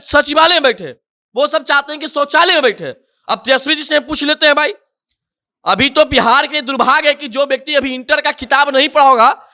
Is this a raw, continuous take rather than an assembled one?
yes; 0 cuts

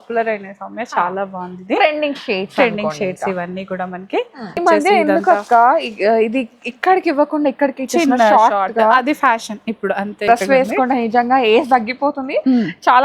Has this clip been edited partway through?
yes; 2 cuts; at 4.6 s, 10.2 s

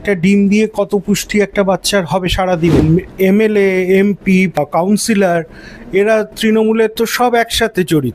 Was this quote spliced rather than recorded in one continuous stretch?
yes; 2 cuts; at 2.8 s, 4.6 s

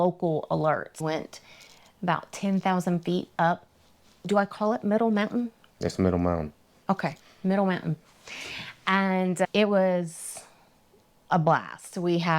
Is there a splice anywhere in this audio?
yes; 1 cut; at 0.9 s

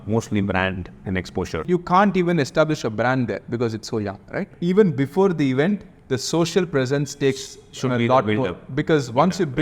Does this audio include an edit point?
yes; 2 cuts; at 1.6 s, 4.5 s

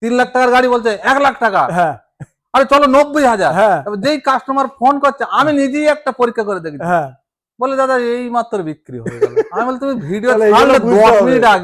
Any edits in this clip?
no; 0 cuts

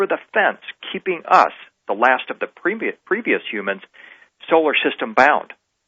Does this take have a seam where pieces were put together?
yes; 1 cut; at 4.5 s

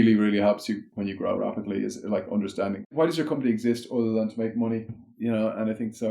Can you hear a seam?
yes; 3 cuts; at 1.2 s, 2.9 s, 5.1 s

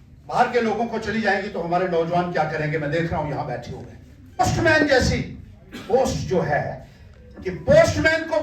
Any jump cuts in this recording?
yes; 1 cut; at 4.4 s

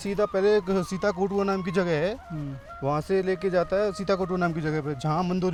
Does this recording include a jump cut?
no; 0 cuts

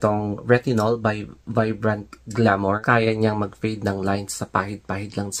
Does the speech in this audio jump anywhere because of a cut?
yes; 1 cut; at 2.8 s

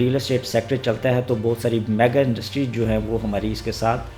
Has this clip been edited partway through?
no; 0 cuts

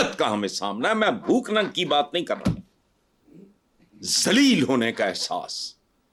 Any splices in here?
no; 0 cuts

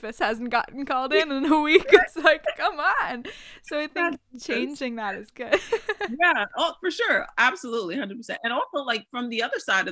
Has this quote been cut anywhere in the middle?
no; 0 cuts

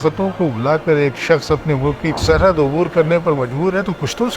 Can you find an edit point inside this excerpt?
yes; 1 cut; at 2.1 s

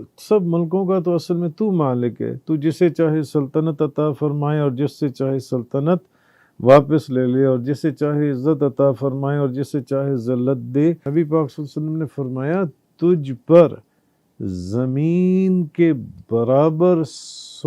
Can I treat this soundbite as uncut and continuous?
no; 1 cut; at 11.0 s

